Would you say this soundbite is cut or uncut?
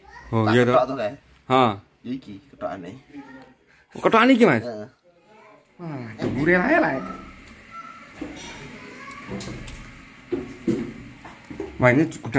cut